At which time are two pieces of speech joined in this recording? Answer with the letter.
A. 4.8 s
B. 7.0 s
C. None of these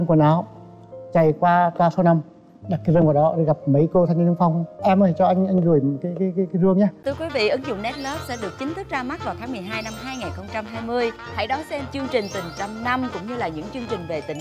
B